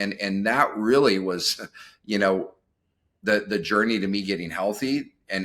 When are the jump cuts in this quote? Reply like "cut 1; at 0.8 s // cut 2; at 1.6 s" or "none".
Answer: none